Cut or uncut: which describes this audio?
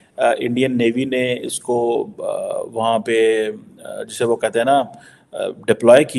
uncut